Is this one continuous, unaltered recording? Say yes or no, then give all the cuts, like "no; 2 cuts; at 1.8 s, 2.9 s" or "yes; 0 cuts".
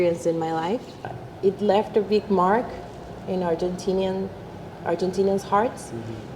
no; 1 cut; at 1.0 s